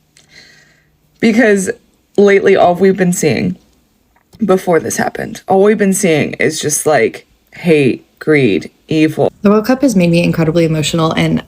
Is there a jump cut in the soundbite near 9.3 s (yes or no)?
yes